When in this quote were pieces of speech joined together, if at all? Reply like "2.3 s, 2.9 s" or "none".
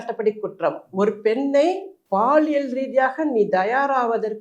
1.9 s